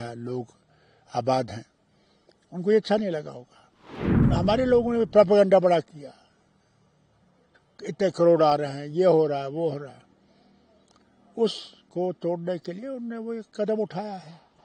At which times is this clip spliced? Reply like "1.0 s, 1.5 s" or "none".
4.2 s